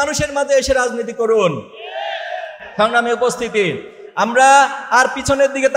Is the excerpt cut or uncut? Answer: uncut